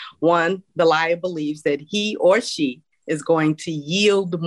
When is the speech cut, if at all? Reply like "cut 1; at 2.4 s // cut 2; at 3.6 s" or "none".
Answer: cut 1; at 2.9 s